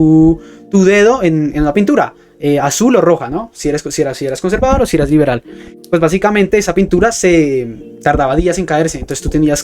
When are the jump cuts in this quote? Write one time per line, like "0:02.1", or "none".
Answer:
none

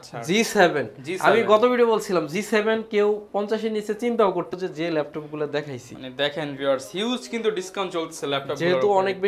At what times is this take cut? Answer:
0:04.5

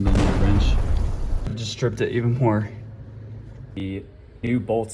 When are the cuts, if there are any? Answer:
0:01.7
0:03.8

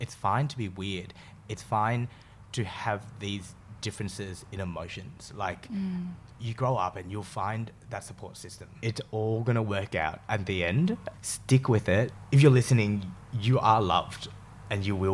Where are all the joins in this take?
0:08.7
0:12.2

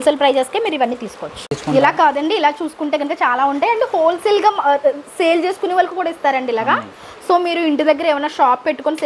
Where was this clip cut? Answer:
none

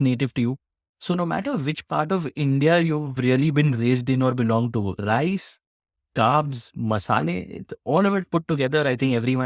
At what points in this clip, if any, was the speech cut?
none

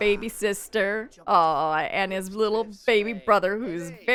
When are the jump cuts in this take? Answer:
none

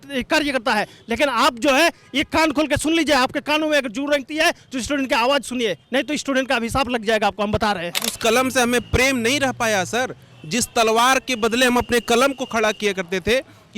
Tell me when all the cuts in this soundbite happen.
0:08.1

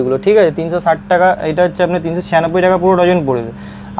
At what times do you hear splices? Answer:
none

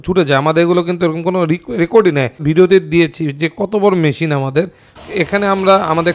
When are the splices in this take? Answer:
0:02.4
0:04.9

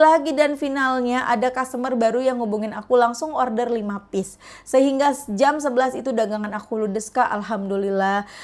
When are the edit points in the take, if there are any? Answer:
none

